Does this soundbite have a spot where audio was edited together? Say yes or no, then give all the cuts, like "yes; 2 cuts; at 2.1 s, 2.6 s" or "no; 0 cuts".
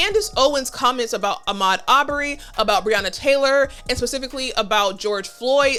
no; 0 cuts